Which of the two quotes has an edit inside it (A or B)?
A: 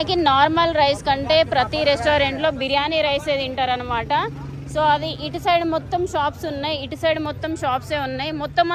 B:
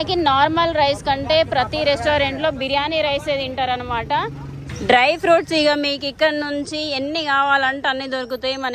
B